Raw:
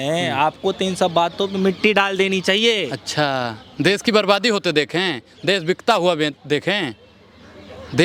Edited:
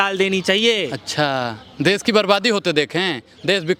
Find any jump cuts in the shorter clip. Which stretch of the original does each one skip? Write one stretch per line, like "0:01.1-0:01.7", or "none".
none